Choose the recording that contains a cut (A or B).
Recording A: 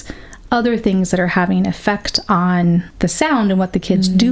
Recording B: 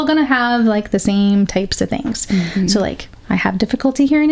A